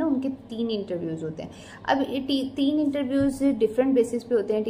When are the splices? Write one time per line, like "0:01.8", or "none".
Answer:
none